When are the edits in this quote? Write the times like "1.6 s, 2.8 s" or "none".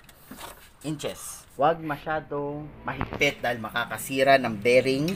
1.2 s